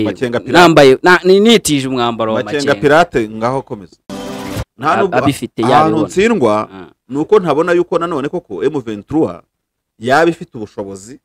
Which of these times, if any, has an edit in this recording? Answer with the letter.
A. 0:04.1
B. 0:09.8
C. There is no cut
A